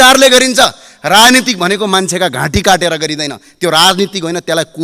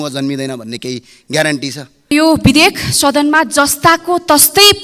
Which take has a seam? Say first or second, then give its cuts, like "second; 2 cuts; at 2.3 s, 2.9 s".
second; 1 cut; at 2.1 s